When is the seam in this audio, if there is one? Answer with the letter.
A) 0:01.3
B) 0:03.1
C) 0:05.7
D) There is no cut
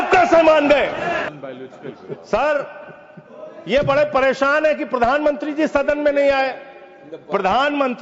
A